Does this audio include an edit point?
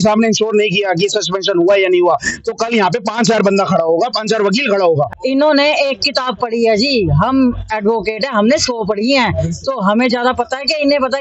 yes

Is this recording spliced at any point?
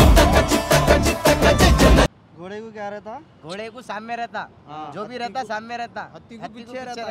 yes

